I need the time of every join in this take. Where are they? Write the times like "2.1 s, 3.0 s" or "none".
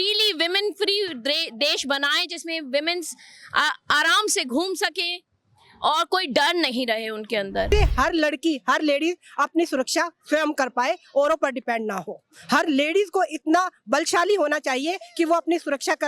7.7 s